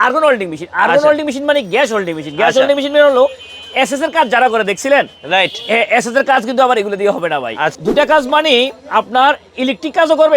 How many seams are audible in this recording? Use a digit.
1